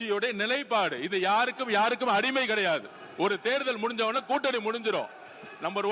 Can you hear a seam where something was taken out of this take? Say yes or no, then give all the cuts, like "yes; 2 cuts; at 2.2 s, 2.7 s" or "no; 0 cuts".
no; 0 cuts